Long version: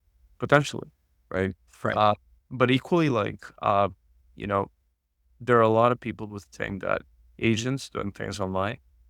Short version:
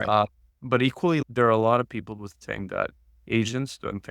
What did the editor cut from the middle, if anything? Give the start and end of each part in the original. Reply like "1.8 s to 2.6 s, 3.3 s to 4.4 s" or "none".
3.1 s to 5.3 s